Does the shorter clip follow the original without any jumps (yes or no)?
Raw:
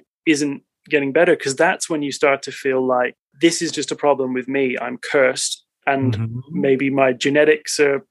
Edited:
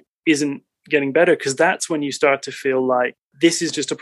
yes